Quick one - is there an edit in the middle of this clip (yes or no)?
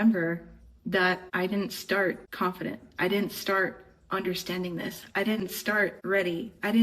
yes